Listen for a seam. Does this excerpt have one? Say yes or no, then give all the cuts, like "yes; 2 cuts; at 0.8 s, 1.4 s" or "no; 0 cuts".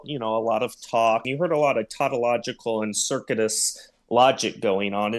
yes; 1 cut; at 1.3 s